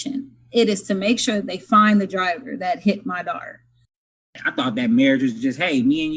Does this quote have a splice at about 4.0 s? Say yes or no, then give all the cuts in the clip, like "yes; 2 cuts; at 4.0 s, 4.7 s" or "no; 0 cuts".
yes; 1 cut; at 4.0 s